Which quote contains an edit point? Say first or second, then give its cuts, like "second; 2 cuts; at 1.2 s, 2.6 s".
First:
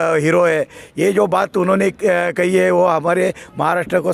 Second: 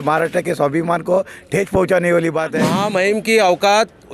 second; 1 cut; at 2.6 s